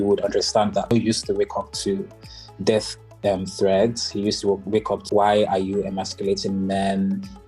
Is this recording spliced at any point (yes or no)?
yes